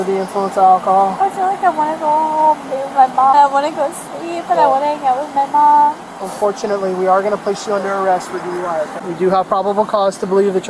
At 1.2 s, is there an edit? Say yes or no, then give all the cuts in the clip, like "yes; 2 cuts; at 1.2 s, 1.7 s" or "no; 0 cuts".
no; 2 cuts; at 3.3 s, 9.0 s